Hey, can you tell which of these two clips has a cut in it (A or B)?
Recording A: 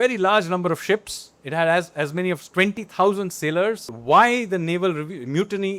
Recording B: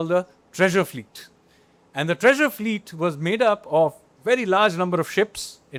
A